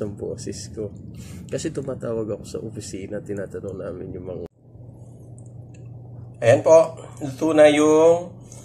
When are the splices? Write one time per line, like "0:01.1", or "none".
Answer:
0:04.5